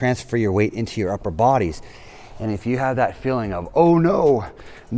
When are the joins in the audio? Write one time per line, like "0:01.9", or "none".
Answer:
none